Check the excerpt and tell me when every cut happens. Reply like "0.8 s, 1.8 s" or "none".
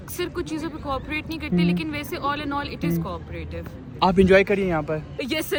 none